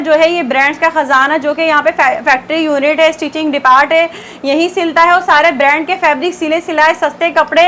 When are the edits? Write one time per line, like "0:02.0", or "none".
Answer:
none